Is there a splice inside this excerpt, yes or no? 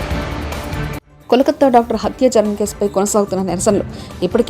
yes